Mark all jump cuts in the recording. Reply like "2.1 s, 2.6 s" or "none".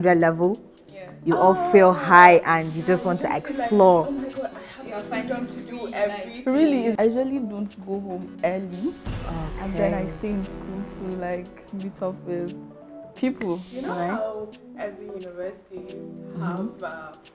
6.9 s, 13.7 s